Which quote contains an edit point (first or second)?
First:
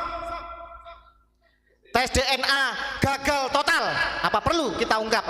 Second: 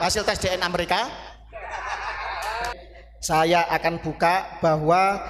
second